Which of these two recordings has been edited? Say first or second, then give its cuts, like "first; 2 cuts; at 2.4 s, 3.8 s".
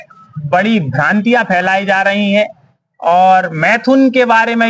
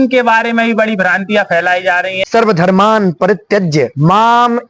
second; 1 cut; at 2.2 s